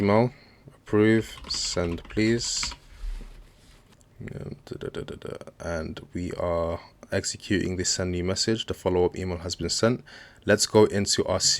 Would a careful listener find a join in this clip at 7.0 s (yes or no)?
no